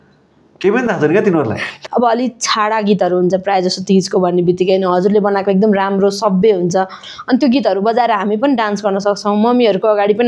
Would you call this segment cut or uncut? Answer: cut